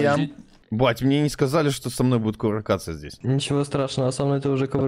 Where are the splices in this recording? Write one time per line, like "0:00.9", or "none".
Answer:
none